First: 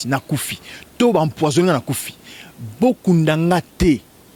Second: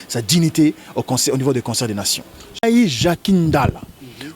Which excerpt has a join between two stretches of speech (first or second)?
second